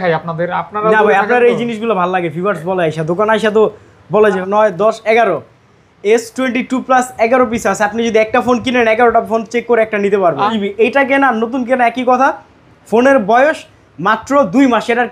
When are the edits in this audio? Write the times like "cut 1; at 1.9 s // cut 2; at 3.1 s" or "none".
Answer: cut 1; at 4.4 s // cut 2; at 10.5 s

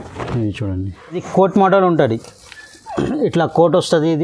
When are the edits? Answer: cut 1; at 1.2 s

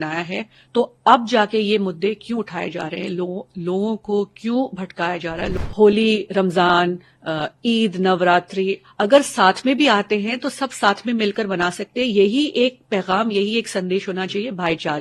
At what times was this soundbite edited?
cut 1; at 5.5 s

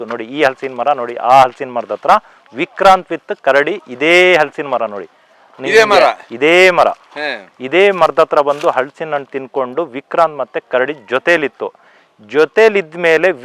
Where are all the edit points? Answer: none

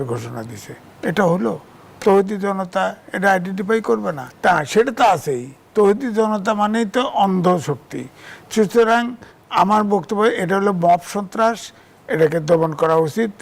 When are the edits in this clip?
cut 1; at 4.2 s

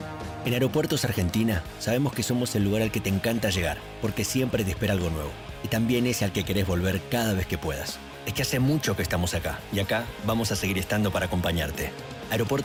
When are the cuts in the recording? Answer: none

